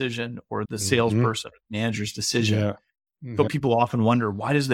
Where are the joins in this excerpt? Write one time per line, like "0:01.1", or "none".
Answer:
0:03.5

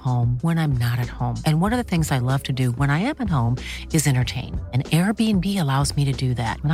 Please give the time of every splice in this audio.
none

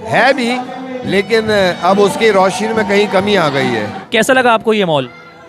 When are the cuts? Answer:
0:03.9

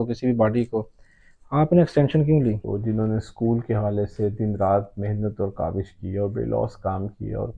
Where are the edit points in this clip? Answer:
0:02.6

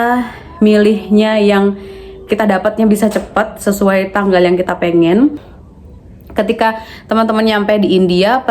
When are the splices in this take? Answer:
0:05.9

